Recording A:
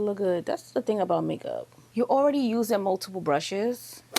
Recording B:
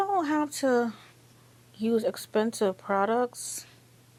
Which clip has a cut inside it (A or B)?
A